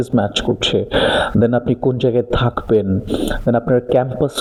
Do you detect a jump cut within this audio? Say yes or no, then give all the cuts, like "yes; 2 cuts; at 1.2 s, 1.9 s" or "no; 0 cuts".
no; 0 cuts